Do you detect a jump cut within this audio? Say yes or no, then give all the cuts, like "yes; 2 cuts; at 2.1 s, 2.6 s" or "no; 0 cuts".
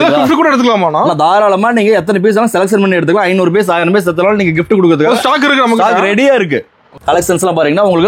yes; 1 cut; at 6.9 s